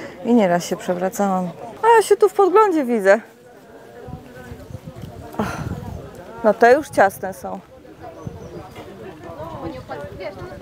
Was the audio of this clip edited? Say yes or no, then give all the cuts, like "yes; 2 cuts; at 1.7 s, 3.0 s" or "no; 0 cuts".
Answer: yes; 1 cut; at 1.6 s